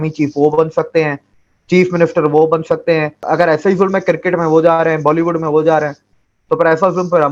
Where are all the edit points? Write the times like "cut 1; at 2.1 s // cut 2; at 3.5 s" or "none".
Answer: cut 1; at 3.3 s